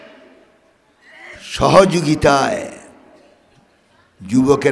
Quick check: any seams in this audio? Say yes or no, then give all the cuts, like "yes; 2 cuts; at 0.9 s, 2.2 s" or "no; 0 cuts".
no; 0 cuts